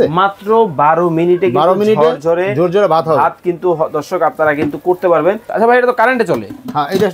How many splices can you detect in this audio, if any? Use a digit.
1